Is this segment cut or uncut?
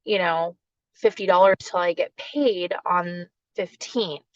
cut